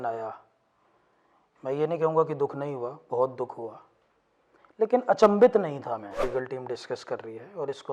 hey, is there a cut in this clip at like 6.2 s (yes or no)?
yes